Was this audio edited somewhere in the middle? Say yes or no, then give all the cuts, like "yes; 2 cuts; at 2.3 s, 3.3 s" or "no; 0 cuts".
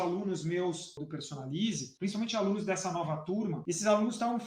yes; 3 cuts; at 1.0 s, 1.9 s, 3.6 s